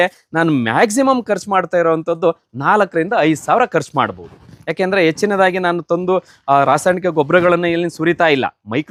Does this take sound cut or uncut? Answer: uncut